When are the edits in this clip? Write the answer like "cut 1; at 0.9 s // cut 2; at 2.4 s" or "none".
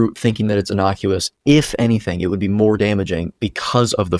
none